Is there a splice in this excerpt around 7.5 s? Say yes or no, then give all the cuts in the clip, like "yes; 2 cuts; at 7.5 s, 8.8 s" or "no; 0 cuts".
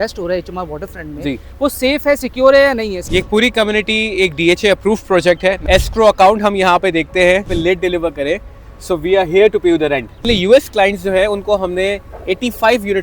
yes; 4 cuts; at 3.0 s, 5.6 s, 7.5 s, 10.3 s